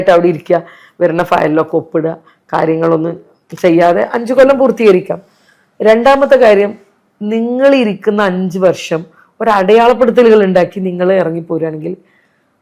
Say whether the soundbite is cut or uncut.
uncut